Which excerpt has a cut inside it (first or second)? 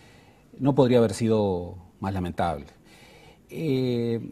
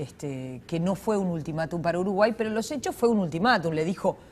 second